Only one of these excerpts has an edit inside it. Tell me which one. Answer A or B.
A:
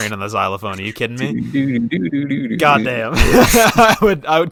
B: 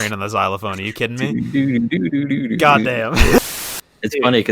B